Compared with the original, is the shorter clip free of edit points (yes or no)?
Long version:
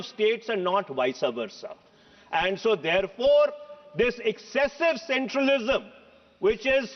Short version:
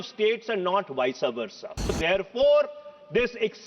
no